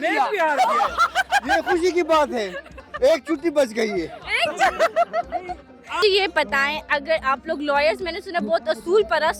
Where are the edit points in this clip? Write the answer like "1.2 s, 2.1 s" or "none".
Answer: 6.0 s